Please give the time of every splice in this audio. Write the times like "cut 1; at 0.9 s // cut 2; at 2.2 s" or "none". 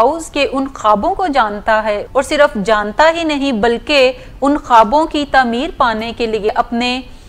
cut 1; at 2.0 s // cut 2; at 6.5 s